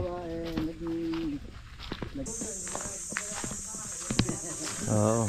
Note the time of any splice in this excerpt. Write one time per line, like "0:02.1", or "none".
0:02.3